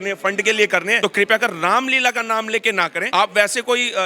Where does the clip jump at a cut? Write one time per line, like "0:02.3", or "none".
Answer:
0:01.0
0:03.0